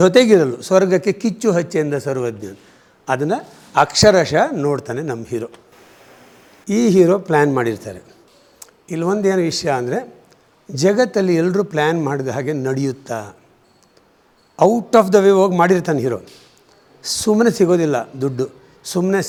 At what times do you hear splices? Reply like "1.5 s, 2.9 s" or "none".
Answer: none